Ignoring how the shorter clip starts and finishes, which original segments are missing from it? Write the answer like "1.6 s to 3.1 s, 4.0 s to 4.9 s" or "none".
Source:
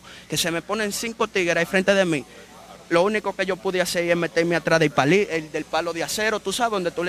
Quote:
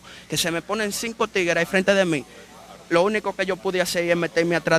none